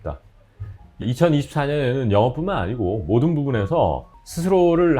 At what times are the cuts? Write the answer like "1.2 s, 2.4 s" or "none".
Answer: 1.0 s